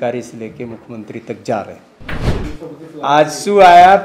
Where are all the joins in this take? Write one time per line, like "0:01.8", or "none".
0:02.2